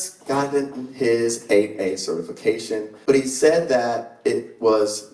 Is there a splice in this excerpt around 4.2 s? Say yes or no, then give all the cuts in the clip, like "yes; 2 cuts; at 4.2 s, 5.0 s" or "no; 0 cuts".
no; 1 cut; at 2.9 s